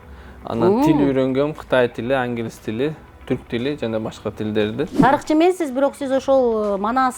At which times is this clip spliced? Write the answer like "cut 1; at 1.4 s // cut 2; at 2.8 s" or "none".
cut 1; at 5.0 s